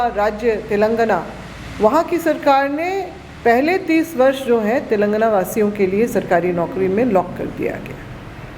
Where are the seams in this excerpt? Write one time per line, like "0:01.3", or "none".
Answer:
none